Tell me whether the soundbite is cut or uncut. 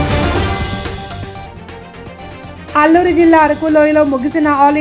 cut